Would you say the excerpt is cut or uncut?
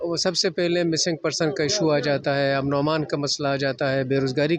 uncut